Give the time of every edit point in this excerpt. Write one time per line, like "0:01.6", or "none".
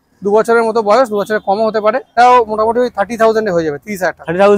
0:02.1